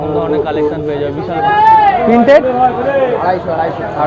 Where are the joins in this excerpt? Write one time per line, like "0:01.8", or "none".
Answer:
0:01.5